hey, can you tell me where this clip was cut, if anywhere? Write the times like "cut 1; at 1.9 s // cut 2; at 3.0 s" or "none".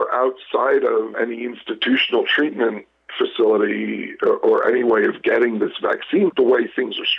cut 1; at 1.1 s // cut 2; at 6.3 s